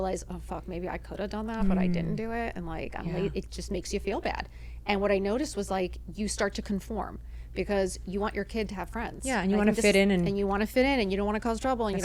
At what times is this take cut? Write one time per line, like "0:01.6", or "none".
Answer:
none